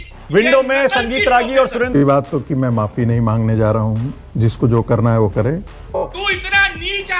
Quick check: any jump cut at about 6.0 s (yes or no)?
yes